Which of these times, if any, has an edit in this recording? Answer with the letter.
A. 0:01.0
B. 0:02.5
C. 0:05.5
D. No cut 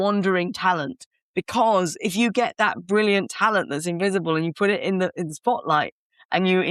D